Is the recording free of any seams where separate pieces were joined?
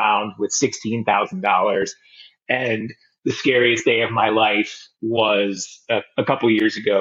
yes; 0 cuts

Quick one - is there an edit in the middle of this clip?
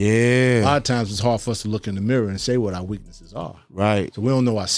no; 0 cuts

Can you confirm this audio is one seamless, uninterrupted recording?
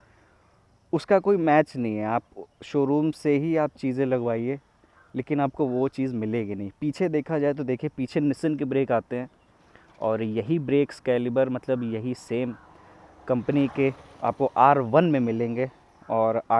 yes; 0 cuts

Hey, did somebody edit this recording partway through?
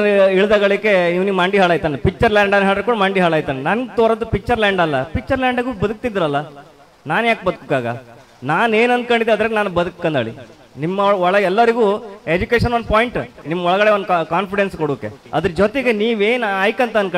yes; 2 cuts; at 13.4 s, 15.2 s

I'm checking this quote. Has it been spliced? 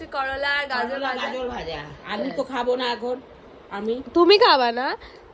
no; 0 cuts

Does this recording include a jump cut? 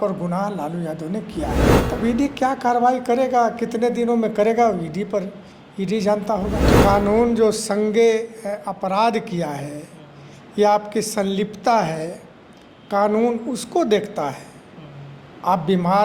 yes; 2 cuts; at 1.7 s, 6.7 s

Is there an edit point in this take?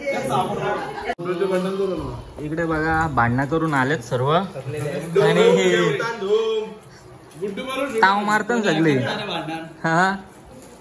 yes; 1 cut; at 1.2 s

